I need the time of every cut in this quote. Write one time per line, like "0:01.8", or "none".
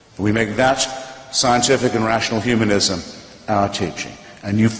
0:02.2